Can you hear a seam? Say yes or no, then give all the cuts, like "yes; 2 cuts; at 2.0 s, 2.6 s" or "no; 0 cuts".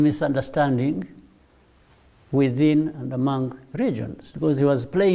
yes; 1 cut; at 4.2 s